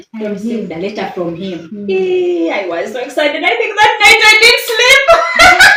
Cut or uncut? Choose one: uncut